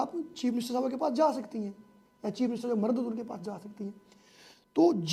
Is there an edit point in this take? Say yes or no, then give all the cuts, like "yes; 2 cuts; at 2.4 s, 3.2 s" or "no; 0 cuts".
no; 0 cuts